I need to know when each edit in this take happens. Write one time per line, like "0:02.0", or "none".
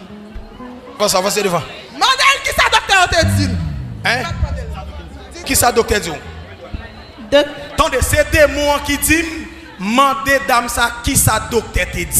0:01.0
0:05.4